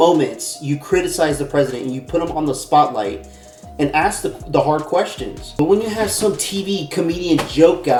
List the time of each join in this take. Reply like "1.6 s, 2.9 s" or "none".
none